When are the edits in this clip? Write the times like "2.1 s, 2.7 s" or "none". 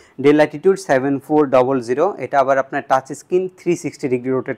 none